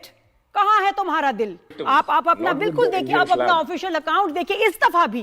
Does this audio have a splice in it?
yes; 1 cut; at 1.7 s

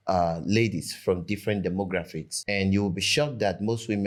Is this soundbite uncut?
yes; 0 cuts

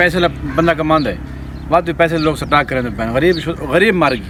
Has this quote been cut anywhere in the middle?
no; 0 cuts

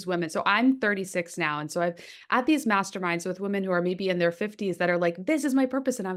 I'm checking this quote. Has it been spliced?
no; 0 cuts

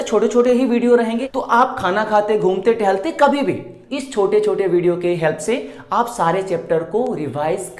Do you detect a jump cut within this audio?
yes; 2 cuts; at 1.2 s, 3.8 s

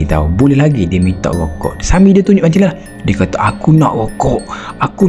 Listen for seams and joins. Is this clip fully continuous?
yes; 0 cuts

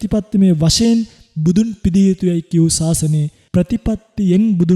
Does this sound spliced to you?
yes; 1 cut; at 3.4 s

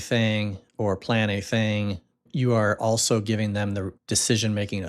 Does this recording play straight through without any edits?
no; 2 cuts; at 2.3 s, 4.0 s

